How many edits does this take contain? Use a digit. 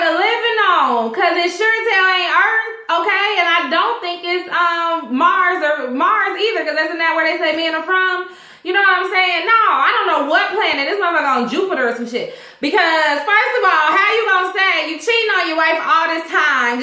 1